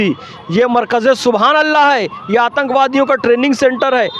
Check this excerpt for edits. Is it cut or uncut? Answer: uncut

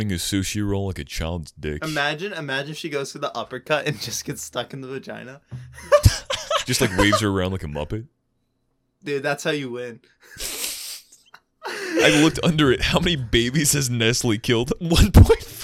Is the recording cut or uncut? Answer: cut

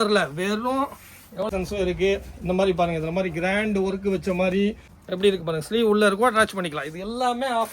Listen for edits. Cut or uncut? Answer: cut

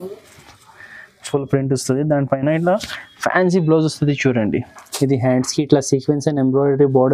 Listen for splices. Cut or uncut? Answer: uncut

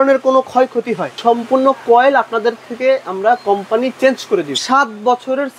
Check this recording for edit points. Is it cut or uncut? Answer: cut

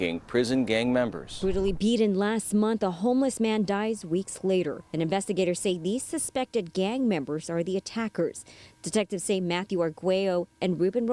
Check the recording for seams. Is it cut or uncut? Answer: cut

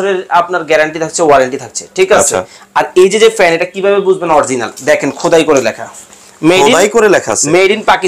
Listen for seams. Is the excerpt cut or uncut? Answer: uncut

